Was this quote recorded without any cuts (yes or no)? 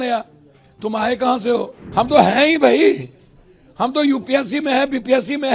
no